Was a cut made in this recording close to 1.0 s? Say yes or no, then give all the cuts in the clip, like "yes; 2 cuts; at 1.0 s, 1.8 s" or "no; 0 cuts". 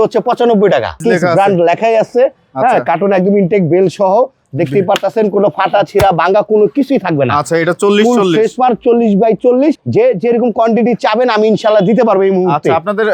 yes; 2 cuts; at 1.0 s, 9.8 s